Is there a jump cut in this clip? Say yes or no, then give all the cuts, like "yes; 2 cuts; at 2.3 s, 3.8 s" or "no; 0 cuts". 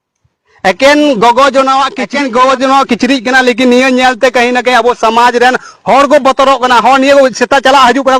yes; 1 cut; at 2.0 s